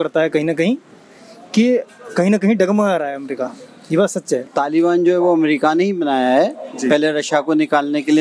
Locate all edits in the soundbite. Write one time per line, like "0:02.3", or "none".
none